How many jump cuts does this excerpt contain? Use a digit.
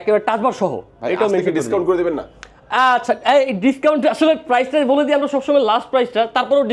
0